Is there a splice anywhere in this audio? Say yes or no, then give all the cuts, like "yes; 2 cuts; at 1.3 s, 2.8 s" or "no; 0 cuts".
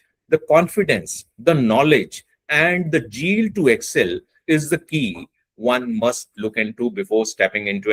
no; 0 cuts